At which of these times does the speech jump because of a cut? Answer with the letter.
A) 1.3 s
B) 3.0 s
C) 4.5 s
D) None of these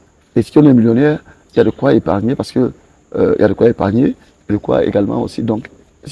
D